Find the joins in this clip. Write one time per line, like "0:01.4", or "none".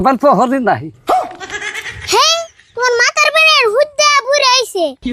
none